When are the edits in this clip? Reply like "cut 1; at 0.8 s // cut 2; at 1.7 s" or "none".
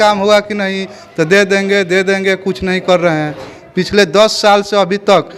none